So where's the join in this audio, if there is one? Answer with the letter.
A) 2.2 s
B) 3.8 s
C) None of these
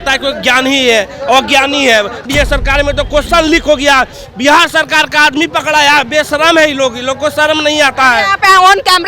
A